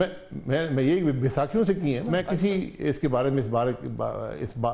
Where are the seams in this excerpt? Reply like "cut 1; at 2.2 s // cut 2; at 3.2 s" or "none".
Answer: cut 1; at 2.0 s